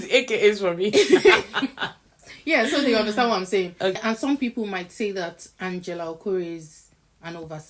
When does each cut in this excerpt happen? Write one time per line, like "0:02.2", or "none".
0:04.0